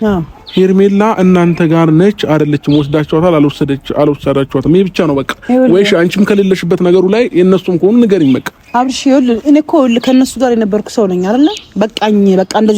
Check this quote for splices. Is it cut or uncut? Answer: uncut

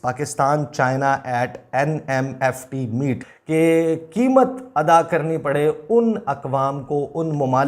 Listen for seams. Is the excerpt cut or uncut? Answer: cut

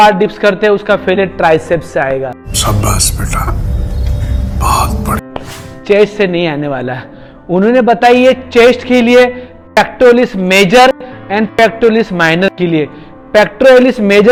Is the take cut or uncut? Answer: uncut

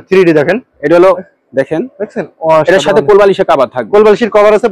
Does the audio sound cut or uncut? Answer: uncut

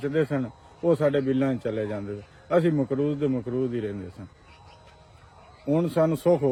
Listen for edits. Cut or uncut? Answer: uncut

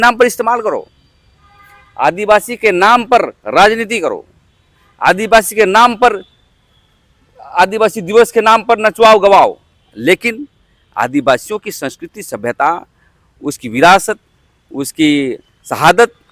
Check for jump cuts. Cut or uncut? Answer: uncut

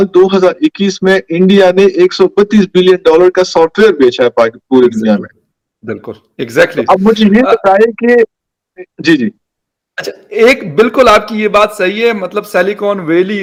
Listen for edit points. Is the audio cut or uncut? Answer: uncut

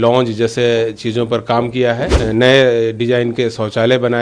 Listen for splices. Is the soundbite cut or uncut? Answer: cut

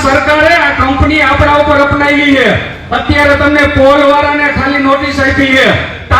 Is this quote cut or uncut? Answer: uncut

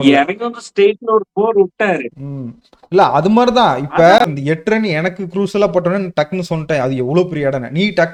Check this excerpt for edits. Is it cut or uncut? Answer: uncut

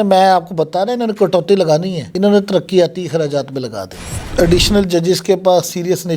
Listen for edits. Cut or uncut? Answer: cut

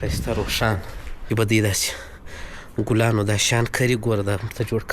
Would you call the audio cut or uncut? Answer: cut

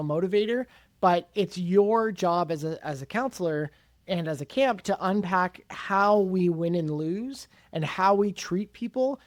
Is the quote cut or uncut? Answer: uncut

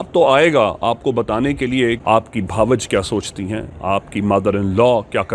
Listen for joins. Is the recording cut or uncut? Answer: cut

